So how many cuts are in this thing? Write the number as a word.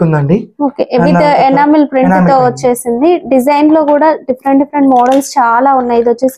zero